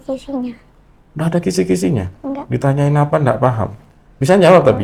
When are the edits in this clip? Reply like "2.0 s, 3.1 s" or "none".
none